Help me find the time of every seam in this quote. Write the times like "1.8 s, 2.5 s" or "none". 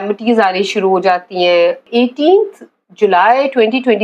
1.8 s

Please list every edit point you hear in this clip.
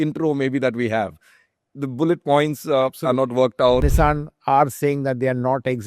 3.9 s

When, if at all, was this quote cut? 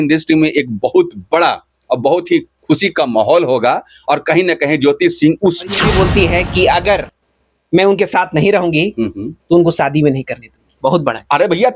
5.8 s

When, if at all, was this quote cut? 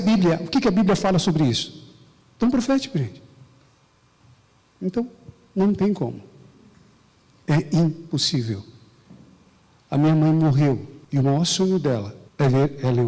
10.9 s, 12.2 s

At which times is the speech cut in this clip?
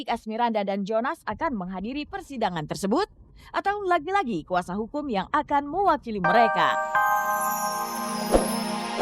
6.6 s

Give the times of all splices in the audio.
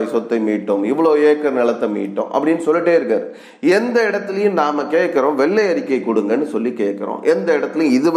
none

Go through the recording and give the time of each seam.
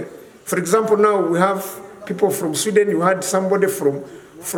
none

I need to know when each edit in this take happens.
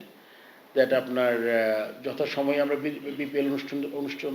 none

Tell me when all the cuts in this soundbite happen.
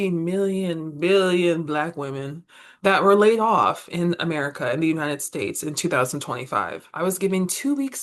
none

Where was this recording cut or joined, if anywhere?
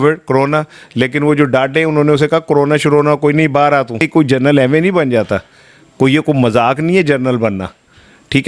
4.0 s

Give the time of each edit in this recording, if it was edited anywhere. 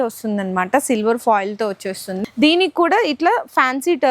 2.1 s

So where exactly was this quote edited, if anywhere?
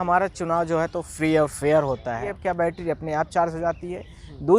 2.4 s

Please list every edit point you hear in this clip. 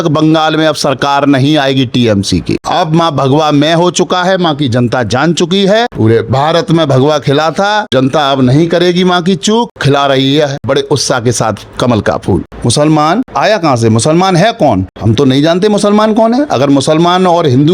2.6 s, 5.9 s, 7.9 s, 9.8 s, 10.6 s, 12.5 s, 13.3 s, 14.9 s

